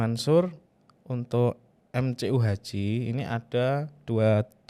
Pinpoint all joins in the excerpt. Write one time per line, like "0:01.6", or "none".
none